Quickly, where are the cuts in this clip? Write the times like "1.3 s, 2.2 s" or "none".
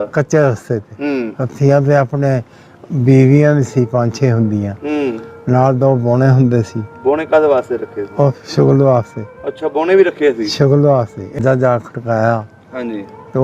11.4 s

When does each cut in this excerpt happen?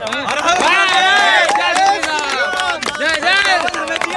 none

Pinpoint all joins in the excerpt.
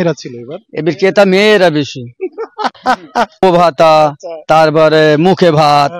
3.4 s

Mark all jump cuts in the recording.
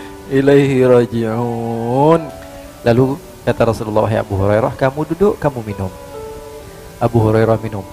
2.3 s

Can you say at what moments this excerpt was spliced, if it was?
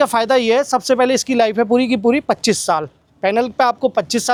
none

